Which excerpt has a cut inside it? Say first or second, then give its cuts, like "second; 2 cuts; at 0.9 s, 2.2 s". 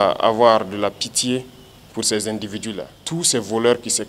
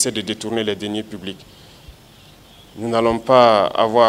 first; 1 cut; at 2.9 s